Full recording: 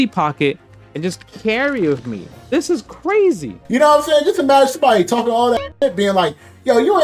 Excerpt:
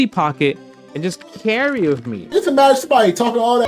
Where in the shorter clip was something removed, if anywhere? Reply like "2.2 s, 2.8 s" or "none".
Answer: 2.3 s